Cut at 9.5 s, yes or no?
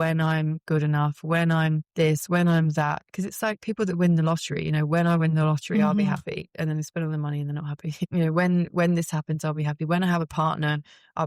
no